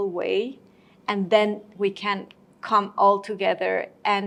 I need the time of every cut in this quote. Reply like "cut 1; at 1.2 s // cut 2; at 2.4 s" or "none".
none